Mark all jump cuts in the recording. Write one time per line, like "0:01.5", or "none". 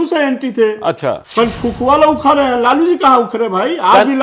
0:01.2